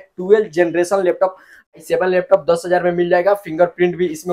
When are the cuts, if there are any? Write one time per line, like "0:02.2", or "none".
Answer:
0:01.7

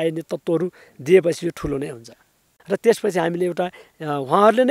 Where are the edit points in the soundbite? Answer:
0:02.6

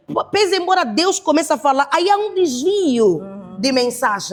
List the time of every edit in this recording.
none

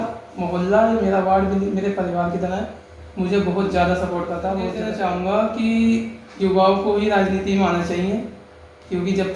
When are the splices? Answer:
0:04.9

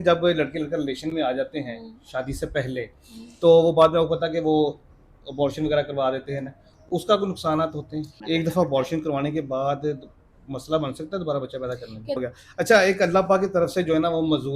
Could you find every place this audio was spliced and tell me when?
0:08.1
0:12.2

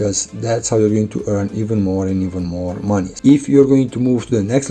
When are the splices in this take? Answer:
0:03.1

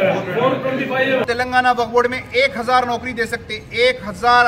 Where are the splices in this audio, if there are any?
0:01.2

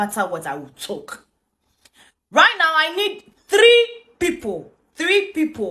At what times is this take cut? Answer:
none

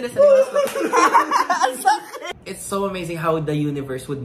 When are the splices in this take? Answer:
0:02.2

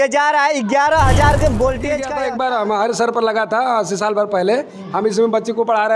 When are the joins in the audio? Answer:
0:02.1

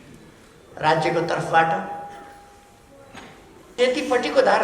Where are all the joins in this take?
0:03.7

